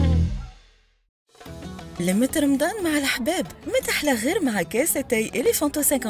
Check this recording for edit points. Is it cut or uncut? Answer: cut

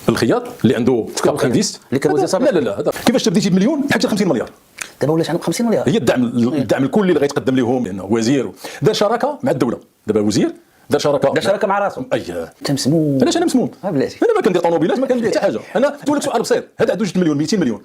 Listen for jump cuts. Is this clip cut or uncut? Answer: cut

